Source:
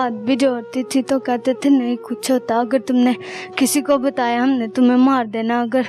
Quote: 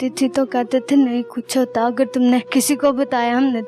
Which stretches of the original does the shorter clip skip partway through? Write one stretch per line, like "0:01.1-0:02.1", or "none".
0:03.2-0:03.5